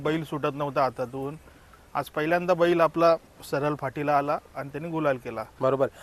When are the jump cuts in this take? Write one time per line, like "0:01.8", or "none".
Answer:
none